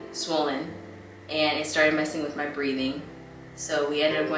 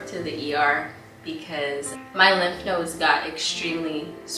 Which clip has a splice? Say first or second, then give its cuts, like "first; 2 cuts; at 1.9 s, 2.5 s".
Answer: second; 1 cut; at 1.9 s